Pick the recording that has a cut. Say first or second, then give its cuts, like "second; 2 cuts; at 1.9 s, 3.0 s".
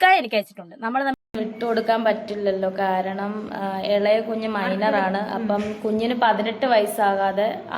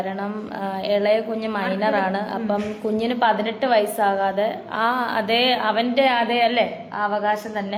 first; 1 cut; at 1.2 s